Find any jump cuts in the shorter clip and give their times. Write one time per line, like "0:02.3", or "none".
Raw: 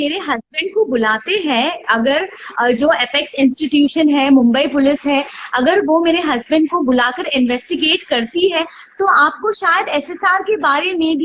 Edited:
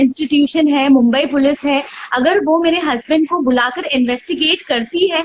none